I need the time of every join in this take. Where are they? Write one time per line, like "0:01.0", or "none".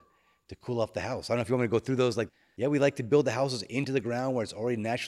0:02.3

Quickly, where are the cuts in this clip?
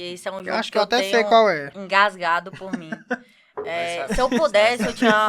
none

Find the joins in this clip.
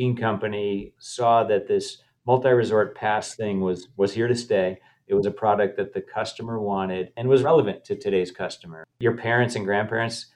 0:01.0
0:07.3
0:09.0

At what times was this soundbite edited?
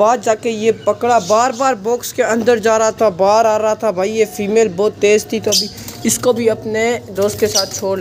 none

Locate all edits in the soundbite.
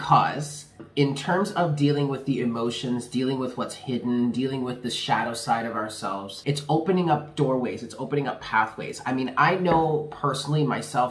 0:00.8
0:06.3

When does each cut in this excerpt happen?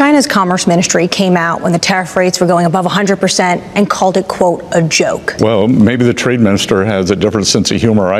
0:05.3

